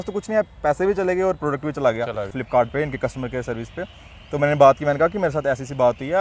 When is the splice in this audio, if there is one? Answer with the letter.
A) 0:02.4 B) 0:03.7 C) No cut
A